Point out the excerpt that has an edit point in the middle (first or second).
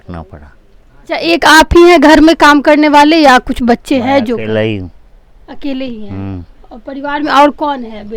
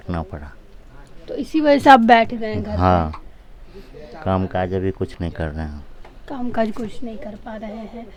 first